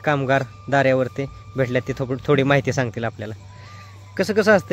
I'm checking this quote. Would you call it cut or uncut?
uncut